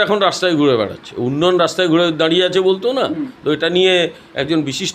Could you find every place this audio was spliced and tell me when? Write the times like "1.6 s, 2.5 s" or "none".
none